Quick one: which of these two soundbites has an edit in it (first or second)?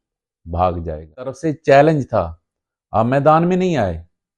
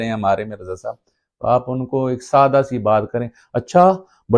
first